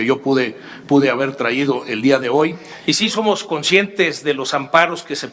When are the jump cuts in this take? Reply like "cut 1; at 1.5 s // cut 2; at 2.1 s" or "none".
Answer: cut 1; at 2.7 s